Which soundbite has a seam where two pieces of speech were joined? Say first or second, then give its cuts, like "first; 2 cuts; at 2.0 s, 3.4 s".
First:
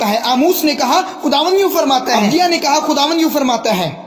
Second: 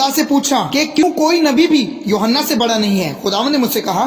second; 1 cut; at 1.0 s